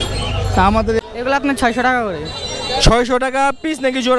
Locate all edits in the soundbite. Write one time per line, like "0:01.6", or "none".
0:01.0